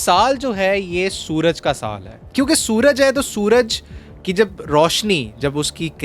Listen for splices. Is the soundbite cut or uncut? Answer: cut